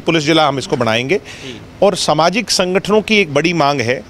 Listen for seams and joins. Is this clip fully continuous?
yes; 0 cuts

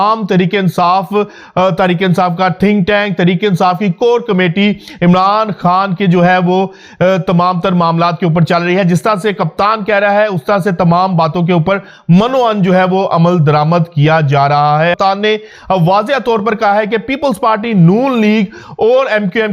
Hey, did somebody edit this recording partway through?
yes; 1 cut; at 15.0 s

